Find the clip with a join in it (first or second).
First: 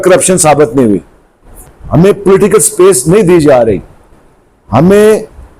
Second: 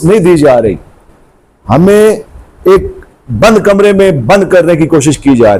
first